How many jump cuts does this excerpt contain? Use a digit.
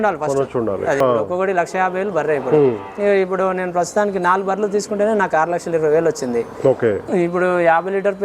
2